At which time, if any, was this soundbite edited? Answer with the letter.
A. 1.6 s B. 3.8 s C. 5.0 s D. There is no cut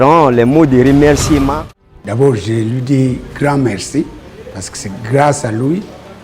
A